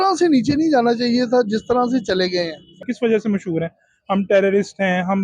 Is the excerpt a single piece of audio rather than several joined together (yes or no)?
no